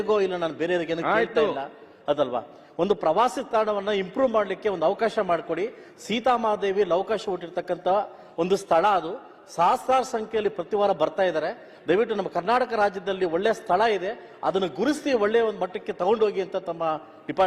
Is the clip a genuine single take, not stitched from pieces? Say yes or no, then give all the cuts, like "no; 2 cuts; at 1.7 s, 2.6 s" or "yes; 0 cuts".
yes; 0 cuts